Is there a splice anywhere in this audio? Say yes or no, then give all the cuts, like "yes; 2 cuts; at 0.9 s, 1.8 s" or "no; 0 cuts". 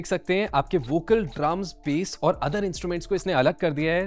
no; 0 cuts